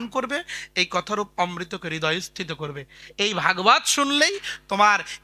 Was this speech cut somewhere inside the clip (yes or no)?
no